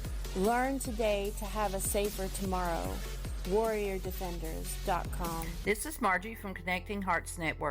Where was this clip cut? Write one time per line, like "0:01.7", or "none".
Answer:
0:05.6